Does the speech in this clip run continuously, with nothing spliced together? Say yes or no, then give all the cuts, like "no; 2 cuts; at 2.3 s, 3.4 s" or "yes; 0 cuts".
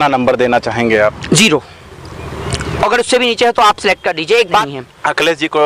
no; 1 cut; at 4.6 s